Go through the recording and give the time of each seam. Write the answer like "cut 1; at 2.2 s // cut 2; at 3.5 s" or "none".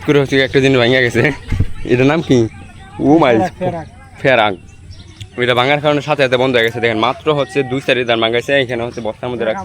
none